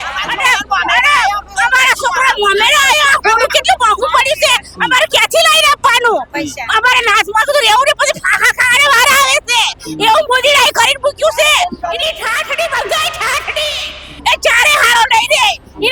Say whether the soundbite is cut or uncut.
uncut